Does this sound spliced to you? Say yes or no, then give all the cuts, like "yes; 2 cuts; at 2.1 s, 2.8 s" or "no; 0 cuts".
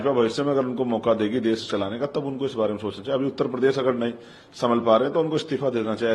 no; 0 cuts